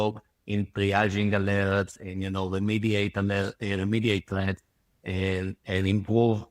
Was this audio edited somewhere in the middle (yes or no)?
no